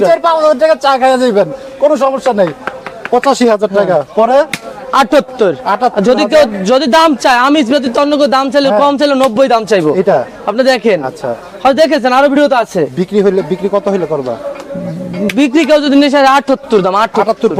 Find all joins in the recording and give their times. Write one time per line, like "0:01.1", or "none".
none

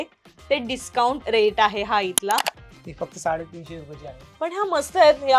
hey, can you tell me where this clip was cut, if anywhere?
0:01.2
0:02.6

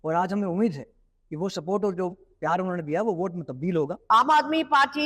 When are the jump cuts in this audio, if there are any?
0:04.1

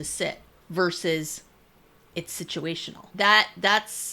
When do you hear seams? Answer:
0:03.1

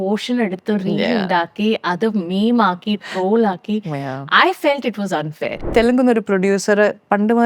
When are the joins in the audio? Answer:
0:05.6

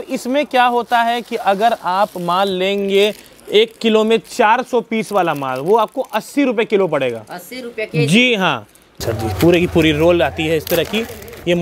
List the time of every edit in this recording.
0:08.9

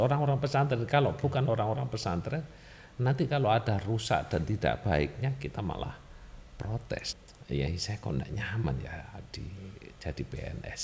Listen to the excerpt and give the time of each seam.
0:07.1

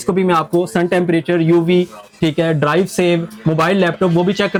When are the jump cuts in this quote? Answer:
none

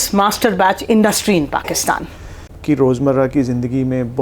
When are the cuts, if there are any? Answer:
0:02.5

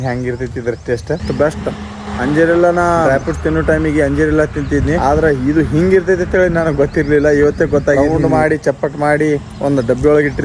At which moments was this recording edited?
0:01.2
0:02.0
0:03.1
0:05.0
0:08.0

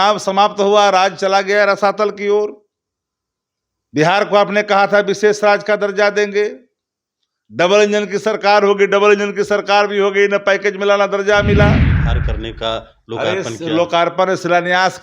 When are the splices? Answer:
0:12.1

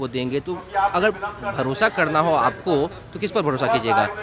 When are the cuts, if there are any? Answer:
none

